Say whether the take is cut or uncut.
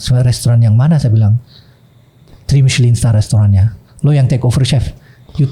uncut